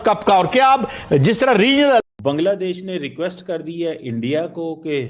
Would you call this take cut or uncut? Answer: cut